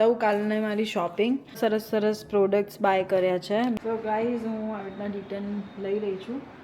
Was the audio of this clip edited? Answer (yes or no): yes